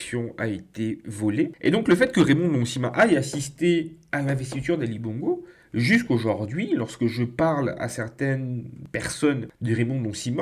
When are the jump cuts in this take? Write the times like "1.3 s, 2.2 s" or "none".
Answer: 1.5 s